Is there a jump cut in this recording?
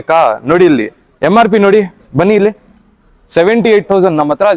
no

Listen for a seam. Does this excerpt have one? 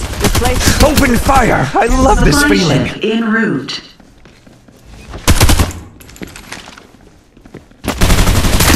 no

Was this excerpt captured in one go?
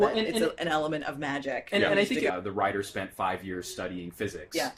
yes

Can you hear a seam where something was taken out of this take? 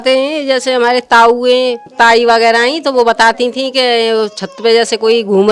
yes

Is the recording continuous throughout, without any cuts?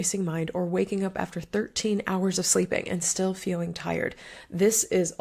yes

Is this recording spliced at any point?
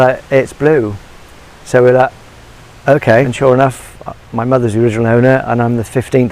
yes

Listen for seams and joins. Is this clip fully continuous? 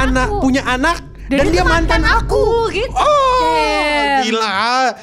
yes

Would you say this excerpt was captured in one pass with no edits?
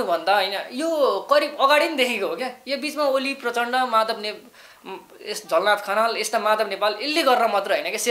yes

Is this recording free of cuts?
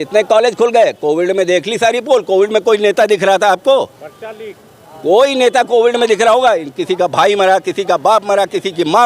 yes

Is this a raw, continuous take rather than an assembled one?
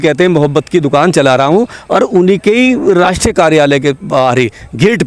yes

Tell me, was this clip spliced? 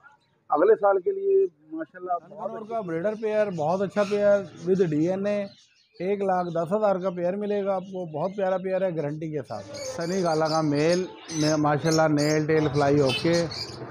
yes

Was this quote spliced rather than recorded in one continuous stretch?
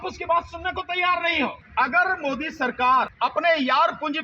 yes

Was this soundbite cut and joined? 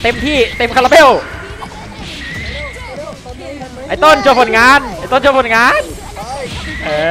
no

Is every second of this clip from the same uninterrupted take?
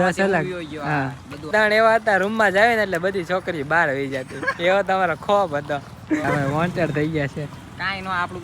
no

